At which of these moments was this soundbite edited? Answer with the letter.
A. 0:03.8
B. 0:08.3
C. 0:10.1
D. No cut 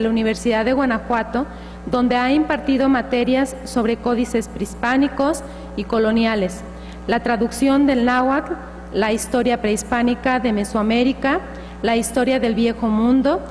A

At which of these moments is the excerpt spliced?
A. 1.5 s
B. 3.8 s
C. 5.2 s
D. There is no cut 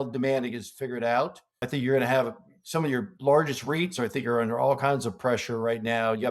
A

